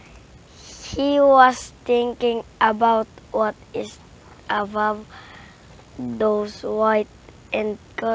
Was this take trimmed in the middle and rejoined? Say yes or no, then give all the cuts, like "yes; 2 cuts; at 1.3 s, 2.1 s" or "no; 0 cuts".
yes; 1 cut; at 2.5 s